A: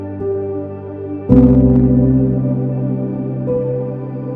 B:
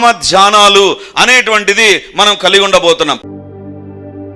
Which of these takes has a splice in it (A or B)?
B